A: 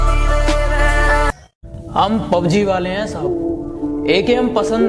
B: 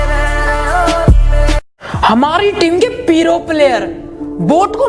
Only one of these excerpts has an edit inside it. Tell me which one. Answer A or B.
B